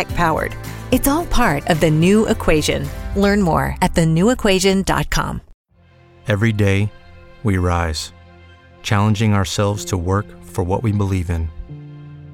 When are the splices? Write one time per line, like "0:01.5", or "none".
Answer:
0:05.8